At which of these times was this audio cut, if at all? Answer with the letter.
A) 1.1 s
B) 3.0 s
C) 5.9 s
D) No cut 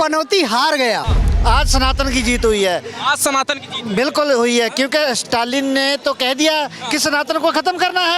A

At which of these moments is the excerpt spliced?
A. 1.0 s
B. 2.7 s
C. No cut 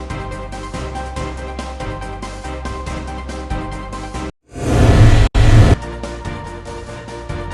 B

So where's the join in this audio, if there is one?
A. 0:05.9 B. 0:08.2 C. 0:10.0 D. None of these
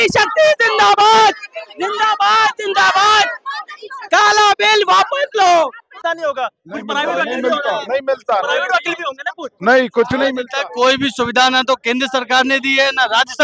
A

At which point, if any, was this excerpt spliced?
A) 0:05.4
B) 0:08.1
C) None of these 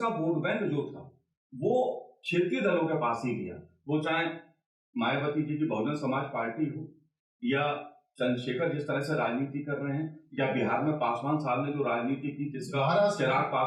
C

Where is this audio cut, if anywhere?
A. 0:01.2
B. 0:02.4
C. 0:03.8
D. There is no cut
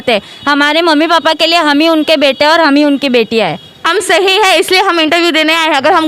C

